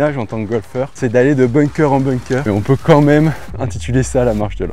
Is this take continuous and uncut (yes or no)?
no